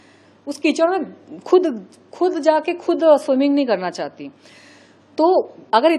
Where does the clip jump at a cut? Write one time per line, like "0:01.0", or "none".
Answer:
none